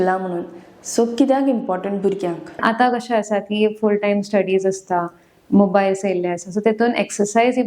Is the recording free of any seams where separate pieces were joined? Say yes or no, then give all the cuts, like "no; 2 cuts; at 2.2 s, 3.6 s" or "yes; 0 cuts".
no; 1 cut; at 2.6 s